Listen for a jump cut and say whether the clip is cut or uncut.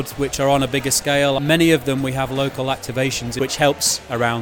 cut